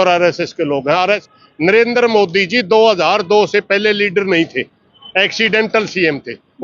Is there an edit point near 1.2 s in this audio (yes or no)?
yes